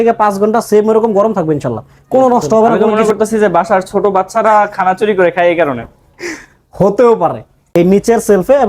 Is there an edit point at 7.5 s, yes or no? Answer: yes